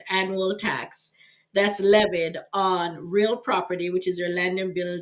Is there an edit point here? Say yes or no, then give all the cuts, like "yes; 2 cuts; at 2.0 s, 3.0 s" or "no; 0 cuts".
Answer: no; 0 cuts